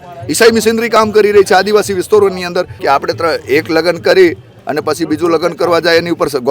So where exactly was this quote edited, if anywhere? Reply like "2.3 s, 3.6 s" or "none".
2.7 s